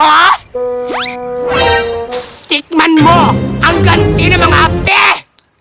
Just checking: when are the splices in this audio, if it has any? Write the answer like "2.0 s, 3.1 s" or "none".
none